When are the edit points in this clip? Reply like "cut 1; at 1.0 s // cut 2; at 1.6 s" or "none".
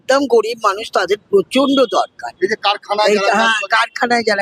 none

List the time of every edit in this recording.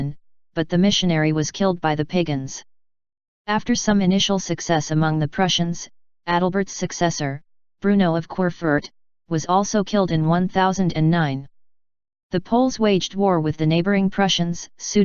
cut 1; at 4.7 s

